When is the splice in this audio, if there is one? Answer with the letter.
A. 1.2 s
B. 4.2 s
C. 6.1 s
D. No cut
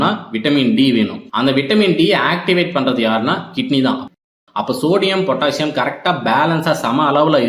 B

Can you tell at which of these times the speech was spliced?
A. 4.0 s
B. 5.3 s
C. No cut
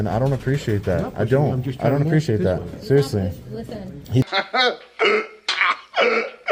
C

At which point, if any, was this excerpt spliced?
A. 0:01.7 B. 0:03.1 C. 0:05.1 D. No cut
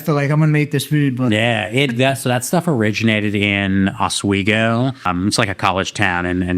C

